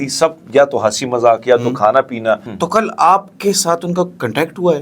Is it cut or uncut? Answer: cut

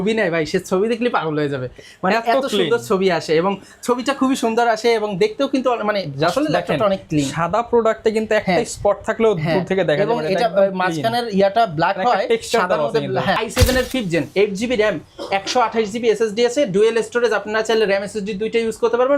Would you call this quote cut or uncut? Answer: cut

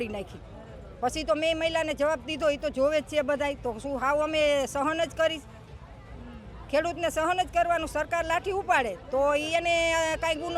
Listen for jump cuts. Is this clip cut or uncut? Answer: uncut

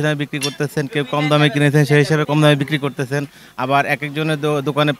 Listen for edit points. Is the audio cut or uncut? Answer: uncut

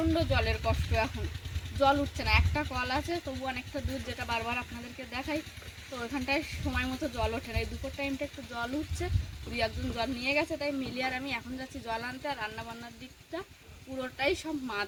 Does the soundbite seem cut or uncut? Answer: uncut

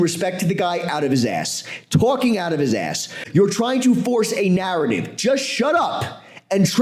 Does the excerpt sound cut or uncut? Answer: cut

